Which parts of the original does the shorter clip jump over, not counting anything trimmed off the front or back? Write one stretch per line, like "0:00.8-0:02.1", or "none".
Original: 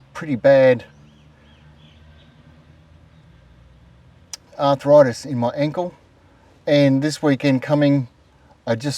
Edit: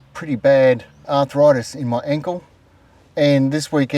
0:00.9-0:04.4

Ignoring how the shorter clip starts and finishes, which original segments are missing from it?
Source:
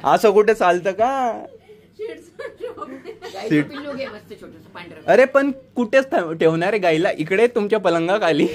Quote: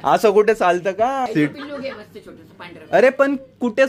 0:01.3-0:03.4

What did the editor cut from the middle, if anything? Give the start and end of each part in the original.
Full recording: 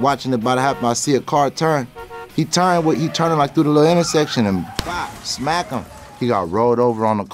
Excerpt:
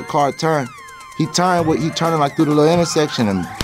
none

